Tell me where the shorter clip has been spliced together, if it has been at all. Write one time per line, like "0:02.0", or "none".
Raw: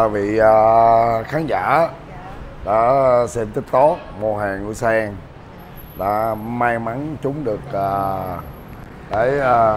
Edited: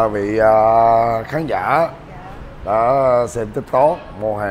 none